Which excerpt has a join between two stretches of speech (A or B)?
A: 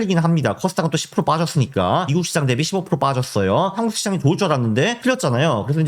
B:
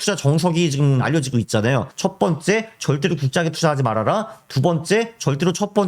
A